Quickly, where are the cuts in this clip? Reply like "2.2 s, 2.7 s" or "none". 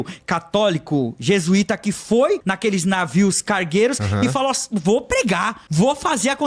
2.5 s, 5.6 s

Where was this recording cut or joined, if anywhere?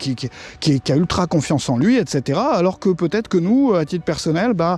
none

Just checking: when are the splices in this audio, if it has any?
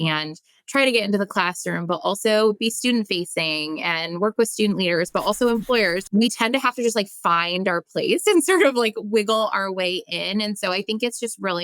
6.0 s

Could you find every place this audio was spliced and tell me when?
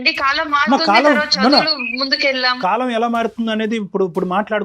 2.6 s

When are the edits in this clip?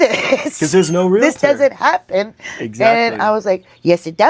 none

